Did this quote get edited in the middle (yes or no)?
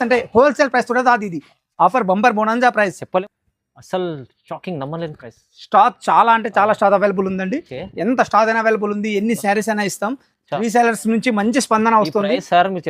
yes